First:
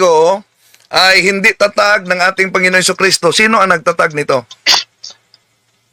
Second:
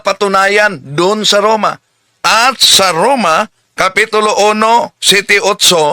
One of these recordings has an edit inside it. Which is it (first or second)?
second